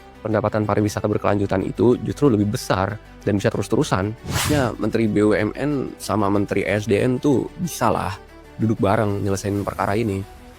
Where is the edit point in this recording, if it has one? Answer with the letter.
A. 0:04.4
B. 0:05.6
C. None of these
A